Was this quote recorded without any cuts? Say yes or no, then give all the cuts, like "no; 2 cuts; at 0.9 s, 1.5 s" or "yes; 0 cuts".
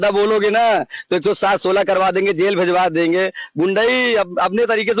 yes; 0 cuts